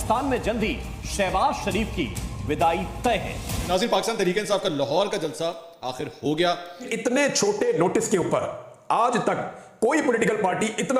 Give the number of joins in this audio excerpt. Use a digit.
2